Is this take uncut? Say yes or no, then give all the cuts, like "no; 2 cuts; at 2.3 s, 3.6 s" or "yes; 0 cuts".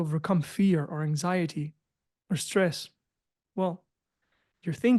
yes; 0 cuts